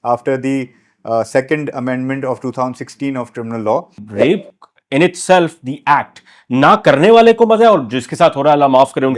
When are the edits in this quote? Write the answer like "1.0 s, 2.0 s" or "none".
4.0 s